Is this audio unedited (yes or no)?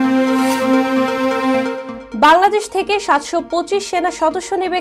yes